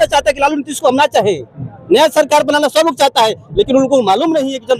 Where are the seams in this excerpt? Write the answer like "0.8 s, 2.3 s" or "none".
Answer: none